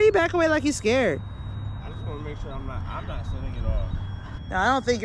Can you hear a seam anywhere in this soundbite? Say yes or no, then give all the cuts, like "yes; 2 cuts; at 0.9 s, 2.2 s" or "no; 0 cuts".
no; 0 cuts